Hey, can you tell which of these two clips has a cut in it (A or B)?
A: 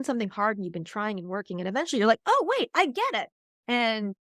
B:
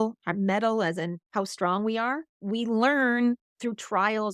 B